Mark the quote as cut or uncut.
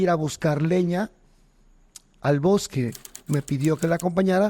cut